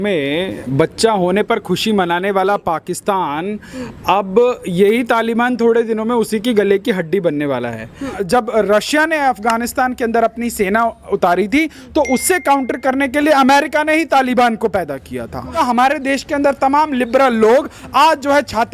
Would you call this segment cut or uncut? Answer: cut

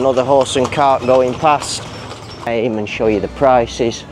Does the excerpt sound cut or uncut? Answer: cut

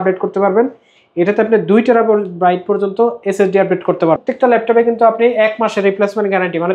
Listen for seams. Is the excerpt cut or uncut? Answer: cut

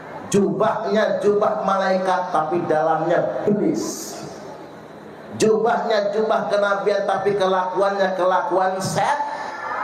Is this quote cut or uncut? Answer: uncut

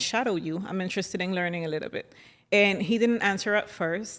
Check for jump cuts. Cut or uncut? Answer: uncut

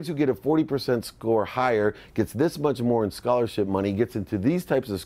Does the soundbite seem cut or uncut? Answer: uncut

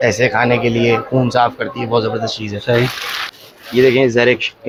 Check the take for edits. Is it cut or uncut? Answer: uncut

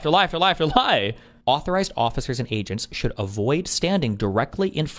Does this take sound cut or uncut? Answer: cut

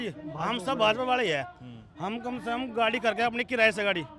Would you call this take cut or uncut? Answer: uncut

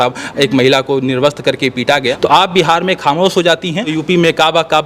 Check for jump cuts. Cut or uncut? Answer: cut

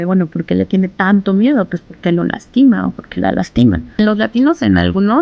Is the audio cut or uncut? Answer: cut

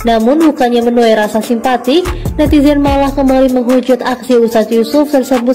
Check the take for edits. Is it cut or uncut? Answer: uncut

